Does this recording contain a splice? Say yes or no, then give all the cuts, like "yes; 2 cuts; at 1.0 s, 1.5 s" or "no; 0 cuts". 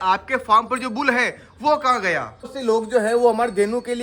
yes; 1 cut; at 2.4 s